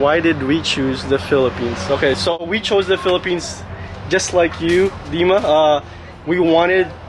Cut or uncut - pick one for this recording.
uncut